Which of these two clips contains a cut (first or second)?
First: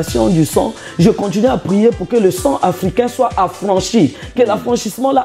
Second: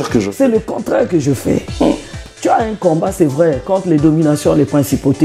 second